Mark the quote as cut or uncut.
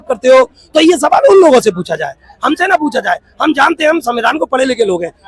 uncut